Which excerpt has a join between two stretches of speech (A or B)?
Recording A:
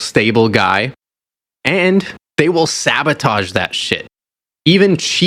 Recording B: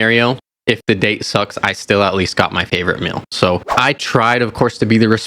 B